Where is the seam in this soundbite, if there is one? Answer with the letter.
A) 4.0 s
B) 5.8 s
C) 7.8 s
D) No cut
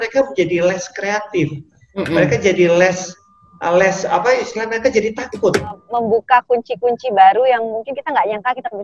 B